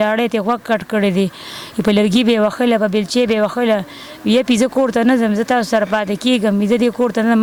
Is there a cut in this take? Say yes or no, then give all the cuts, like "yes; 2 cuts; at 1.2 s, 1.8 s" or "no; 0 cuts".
no; 0 cuts